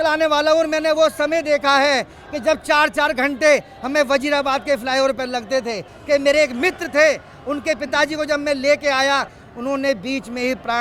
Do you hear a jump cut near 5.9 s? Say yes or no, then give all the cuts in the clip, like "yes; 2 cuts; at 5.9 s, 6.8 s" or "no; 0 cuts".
yes; 2 cuts; at 5.9 s, 9.4 s